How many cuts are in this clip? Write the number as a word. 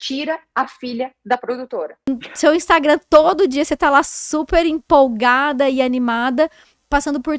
one